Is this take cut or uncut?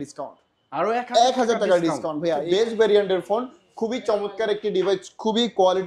cut